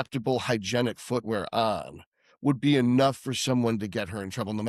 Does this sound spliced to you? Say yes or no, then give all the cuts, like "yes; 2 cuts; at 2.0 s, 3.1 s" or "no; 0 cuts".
no; 0 cuts